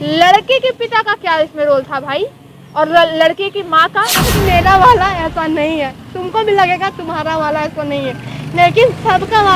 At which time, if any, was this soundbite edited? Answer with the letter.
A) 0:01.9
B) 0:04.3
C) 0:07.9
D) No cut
B